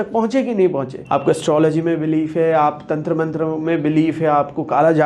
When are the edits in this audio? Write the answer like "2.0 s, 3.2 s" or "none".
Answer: 0.9 s